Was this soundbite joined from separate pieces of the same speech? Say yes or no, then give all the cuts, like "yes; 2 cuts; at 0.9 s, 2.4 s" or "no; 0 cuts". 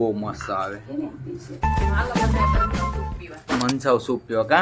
no; 0 cuts